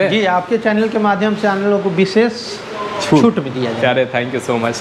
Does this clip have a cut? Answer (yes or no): no